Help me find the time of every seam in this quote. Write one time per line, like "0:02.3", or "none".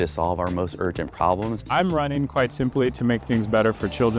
0:01.6